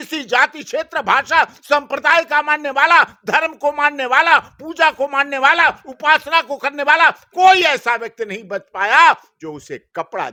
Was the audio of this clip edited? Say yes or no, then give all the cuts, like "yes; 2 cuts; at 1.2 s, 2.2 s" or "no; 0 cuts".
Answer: no; 0 cuts